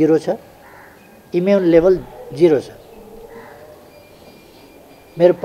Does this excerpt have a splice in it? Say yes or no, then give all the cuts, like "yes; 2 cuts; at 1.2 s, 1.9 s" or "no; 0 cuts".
no; 0 cuts